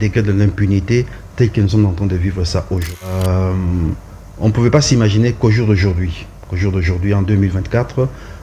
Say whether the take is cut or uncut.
cut